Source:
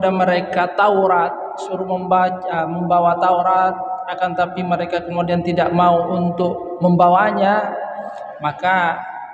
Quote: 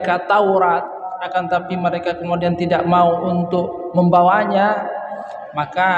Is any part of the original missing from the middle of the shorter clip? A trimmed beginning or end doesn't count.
yes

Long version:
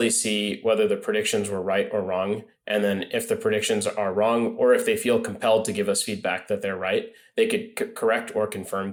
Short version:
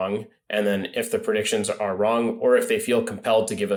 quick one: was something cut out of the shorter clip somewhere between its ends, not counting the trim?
no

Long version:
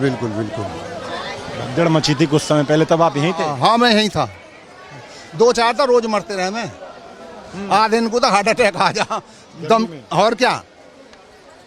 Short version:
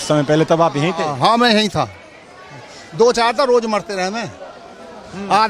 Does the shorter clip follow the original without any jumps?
yes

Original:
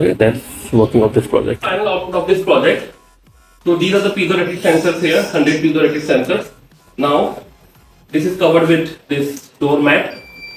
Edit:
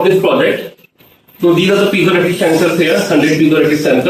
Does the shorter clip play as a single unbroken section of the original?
yes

